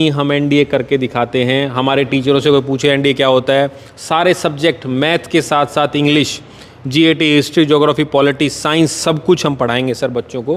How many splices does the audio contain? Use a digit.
0